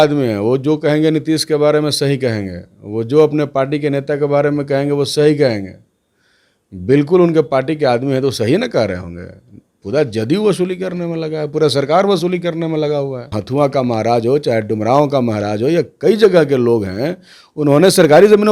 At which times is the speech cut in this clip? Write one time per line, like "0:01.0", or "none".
0:13.4